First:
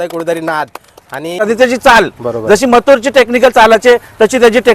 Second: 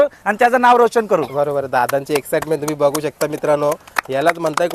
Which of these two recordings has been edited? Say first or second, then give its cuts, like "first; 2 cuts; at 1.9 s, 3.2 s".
first; 1 cut; at 1.4 s